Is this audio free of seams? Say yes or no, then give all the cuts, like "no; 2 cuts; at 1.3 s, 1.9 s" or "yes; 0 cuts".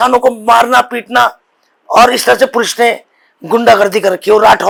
yes; 0 cuts